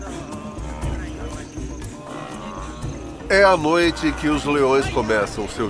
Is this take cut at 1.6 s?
yes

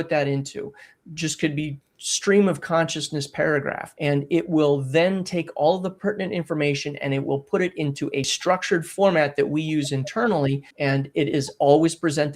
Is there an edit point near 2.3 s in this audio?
no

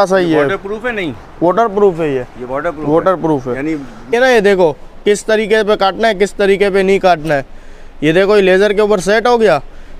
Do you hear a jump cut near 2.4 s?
no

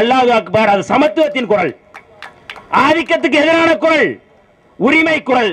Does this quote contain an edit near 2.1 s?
no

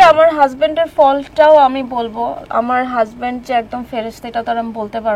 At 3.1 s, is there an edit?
no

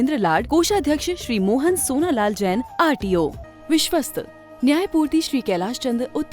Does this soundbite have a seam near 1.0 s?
no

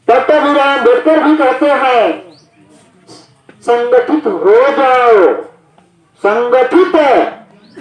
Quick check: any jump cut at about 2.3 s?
no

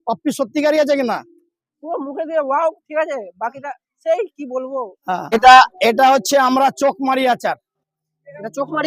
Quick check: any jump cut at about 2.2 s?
no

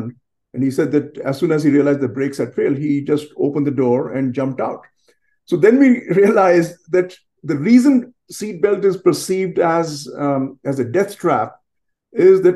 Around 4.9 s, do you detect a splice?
no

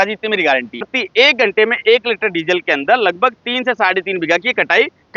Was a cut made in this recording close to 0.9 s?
yes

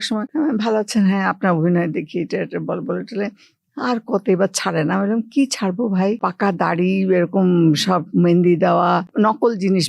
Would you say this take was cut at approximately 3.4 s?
no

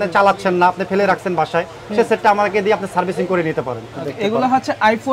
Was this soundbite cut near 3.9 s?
yes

